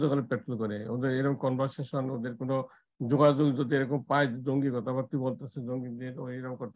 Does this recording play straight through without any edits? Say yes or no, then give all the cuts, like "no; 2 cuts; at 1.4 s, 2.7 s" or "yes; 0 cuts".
yes; 0 cuts